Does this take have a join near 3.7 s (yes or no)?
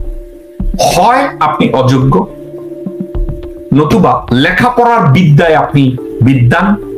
yes